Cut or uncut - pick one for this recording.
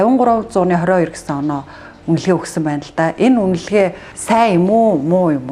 cut